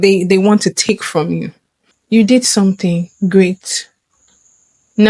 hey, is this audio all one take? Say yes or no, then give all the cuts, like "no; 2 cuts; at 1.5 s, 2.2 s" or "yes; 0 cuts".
no; 1 cut; at 1.4 s